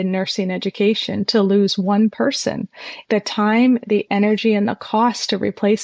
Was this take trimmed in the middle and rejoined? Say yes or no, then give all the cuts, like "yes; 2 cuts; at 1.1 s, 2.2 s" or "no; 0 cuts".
no; 0 cuts